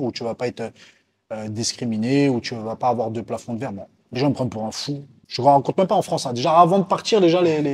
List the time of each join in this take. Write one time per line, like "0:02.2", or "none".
0:04.0